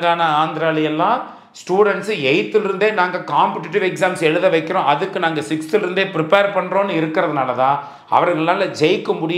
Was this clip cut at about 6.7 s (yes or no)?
no